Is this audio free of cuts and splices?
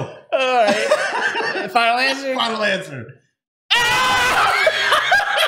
yes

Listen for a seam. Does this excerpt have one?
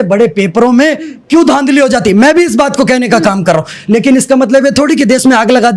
no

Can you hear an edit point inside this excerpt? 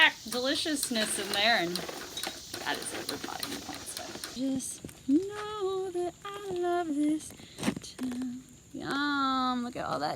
yes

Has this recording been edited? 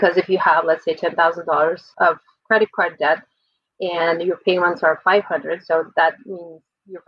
no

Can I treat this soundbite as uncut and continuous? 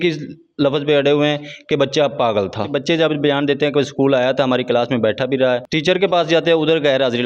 no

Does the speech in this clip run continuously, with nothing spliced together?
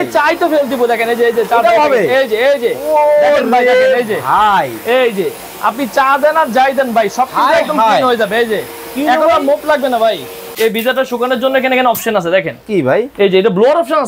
no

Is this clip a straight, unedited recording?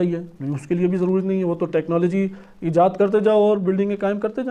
yes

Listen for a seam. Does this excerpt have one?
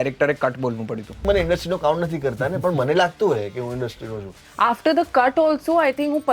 yes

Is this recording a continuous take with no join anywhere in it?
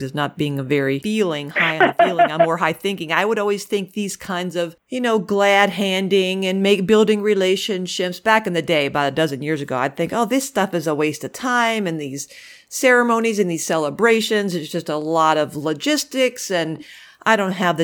no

